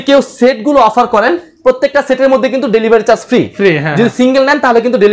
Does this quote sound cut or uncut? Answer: uncut